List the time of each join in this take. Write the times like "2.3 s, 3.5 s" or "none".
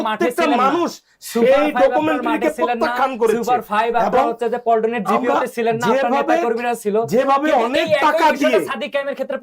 none